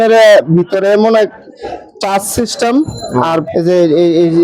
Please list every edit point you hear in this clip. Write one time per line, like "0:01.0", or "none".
0:03.5